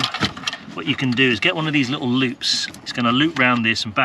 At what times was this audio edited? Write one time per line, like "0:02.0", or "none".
0:02.8